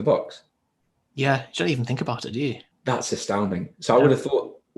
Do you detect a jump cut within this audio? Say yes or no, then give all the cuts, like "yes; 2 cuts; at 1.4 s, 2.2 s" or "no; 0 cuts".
yes; 1 cut; at 2.7 s